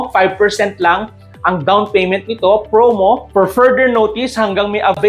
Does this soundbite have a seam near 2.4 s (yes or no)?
no